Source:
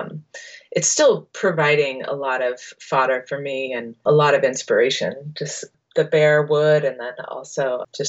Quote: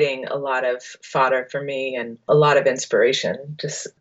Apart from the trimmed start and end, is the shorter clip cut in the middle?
no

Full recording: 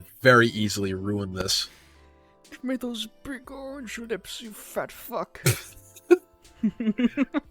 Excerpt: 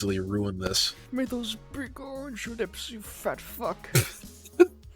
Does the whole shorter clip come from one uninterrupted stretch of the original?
no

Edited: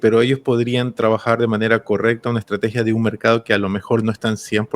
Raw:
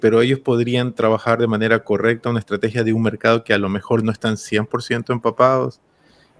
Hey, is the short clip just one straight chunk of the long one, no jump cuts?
yes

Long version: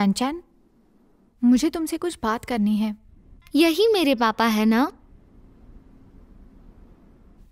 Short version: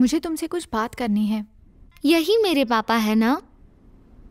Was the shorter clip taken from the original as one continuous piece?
yes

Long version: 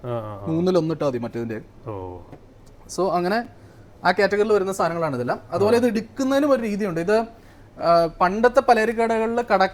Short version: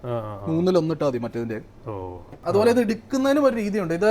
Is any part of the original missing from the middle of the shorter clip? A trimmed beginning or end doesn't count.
yes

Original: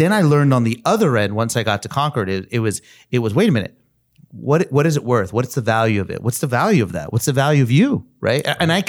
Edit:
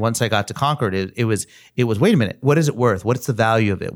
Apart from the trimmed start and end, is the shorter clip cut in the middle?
yes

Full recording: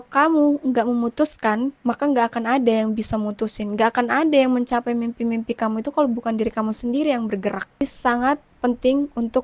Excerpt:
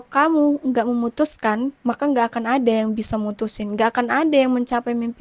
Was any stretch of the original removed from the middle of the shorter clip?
no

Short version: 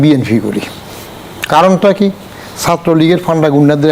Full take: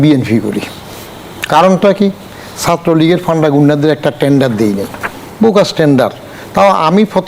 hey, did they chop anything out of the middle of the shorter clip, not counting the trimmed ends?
no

